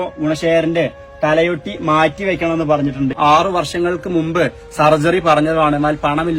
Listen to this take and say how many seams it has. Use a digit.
1